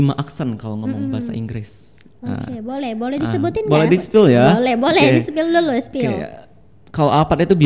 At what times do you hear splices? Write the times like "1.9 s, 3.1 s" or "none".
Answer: none